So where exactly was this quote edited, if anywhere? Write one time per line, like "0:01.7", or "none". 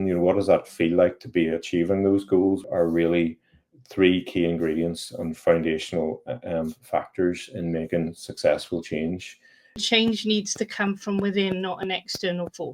0:02.6
0:09.8